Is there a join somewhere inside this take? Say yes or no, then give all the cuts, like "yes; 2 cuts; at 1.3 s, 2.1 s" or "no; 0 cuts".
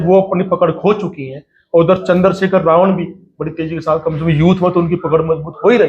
no; 0 cuts